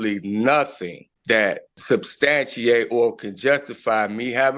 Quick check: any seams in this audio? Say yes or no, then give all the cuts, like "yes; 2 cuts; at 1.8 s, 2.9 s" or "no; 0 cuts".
no; 0 cuts